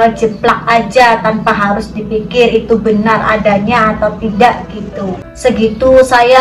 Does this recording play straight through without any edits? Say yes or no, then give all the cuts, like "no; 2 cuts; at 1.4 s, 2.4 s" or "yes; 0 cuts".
no; 1 cut; at 5.2 s